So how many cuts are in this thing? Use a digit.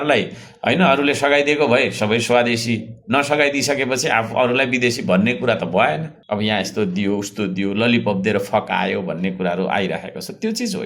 1